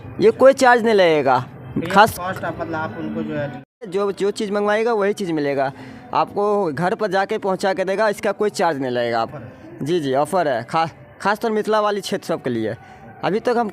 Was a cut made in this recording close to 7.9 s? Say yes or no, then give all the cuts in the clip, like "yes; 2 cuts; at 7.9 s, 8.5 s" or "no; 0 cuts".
no; 2 cuts; at 3.9 s, 9.3 s